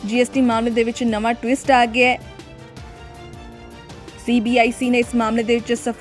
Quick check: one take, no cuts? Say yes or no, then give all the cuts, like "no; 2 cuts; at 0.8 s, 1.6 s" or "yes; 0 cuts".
no; 2 cuts; at 2.2 s, 4.2 s